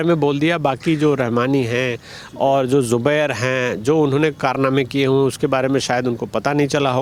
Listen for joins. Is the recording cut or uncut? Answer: uncut